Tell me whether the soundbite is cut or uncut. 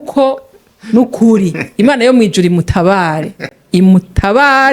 uncut